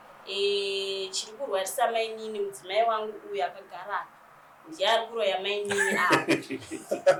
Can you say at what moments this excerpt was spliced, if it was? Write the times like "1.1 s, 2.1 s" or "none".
none